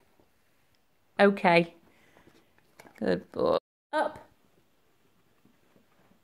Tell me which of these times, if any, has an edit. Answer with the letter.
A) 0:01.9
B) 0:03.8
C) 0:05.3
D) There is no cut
B